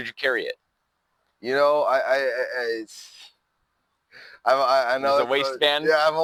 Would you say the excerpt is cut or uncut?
uncut